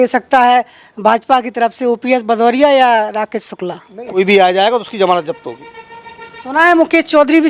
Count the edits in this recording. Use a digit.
1